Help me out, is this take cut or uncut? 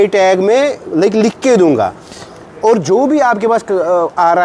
uncut